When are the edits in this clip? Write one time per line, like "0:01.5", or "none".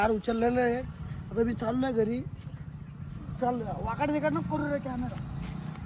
none